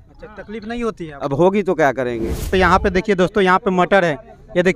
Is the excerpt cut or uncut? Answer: cut